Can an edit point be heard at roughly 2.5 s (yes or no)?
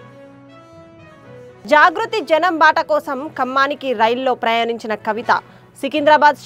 no